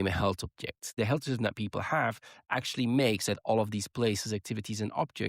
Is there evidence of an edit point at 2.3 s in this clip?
no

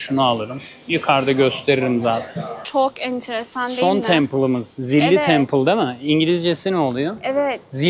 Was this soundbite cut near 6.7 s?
no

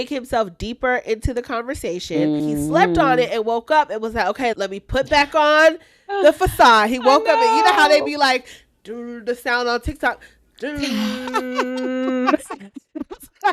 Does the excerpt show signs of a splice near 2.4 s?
yes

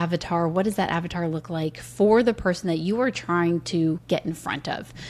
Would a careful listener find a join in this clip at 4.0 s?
yes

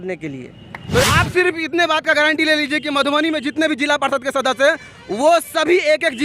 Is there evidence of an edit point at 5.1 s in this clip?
no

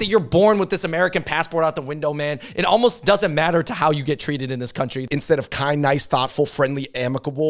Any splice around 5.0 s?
yes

